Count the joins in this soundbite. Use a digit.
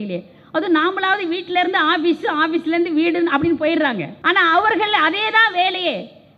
1